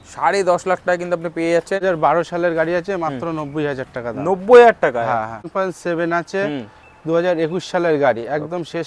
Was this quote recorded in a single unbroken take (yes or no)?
no